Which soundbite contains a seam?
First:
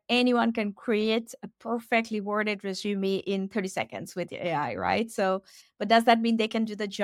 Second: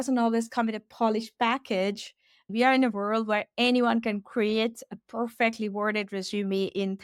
second; 1 cut; at 2.5 s

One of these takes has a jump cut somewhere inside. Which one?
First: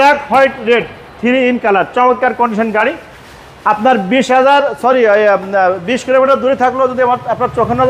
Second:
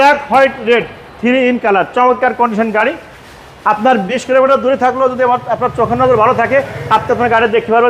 second; 1 cut; at 4.1 s

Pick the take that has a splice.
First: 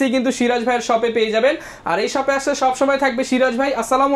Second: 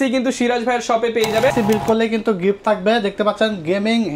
second; 1 cut; at 1.5 s

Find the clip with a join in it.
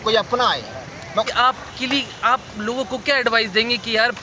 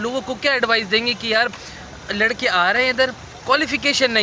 first; 1 cut; at 1.3 s

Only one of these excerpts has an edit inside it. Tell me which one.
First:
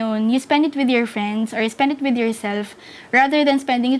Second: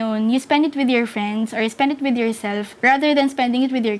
second; 1 cut; at 2.7 s

